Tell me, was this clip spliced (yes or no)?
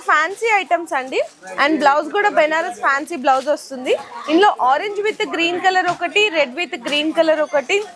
no